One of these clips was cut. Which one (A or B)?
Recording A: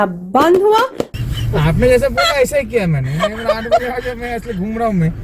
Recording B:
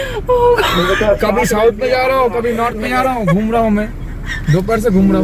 A